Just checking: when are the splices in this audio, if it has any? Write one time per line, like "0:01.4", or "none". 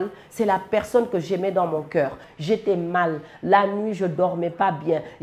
0:02.2